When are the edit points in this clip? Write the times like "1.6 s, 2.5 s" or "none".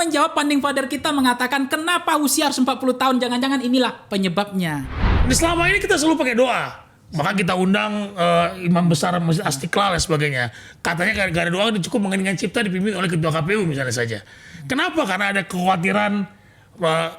5.2 s

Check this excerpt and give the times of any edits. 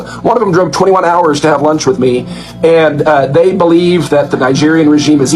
none

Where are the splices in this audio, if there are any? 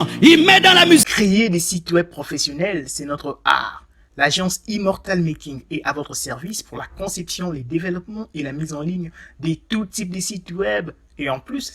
1.0 s

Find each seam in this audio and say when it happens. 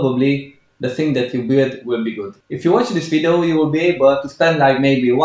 2.4 s

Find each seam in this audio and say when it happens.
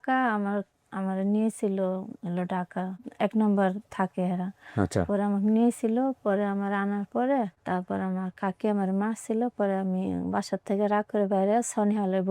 3.0 s, 7.6 s

